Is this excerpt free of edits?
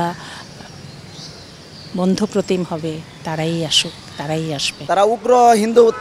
no; 1 cut; at 4.8 s

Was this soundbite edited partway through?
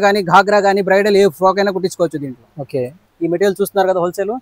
yes; 1 cut; at 2.9 s

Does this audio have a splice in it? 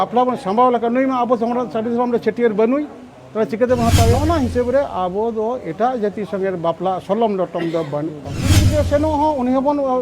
yes; 2 cuts; at 4.2 s, 8.6 s

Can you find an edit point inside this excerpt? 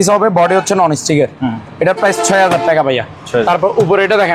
no; 0 cuts

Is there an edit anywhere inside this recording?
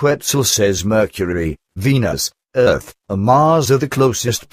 yes; 2 cuts; at 0.8 s, 1.8 s

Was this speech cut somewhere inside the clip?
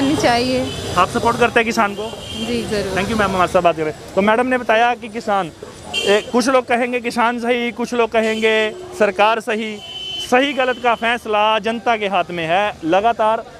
no; 0 cuts

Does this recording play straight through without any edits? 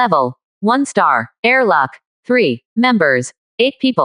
no; 1 cut; at 1.3 s

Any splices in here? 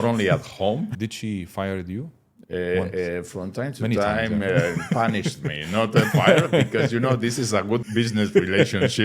yes; 2 cuts; at 1.0 s, 7.8 s

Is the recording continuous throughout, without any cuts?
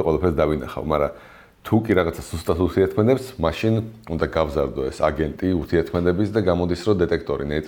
yes; 0 cuts

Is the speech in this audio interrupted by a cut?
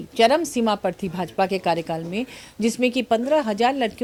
no; 0 cuts

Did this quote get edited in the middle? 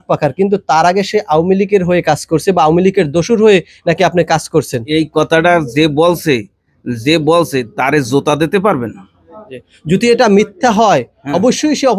no; 0 cuts

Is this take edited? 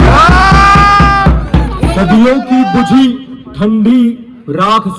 yes; 1 cut; at 1.9 s

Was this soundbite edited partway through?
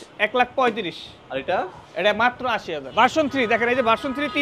yes; 1 cut; at 2.8 s

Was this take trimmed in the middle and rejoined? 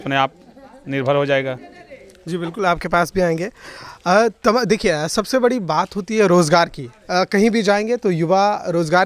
no; 0 cuts

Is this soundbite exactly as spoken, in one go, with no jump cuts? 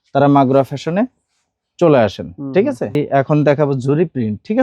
no; 1 cut; at 3.0 s

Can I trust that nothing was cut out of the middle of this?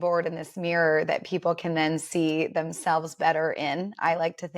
yes; 0 cuts

